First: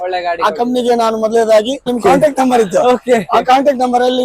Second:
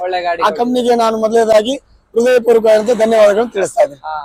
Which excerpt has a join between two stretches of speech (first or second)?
first